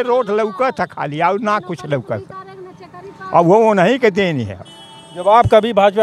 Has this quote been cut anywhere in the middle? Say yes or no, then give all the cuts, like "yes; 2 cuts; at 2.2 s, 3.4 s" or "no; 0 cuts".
no; 0 cuts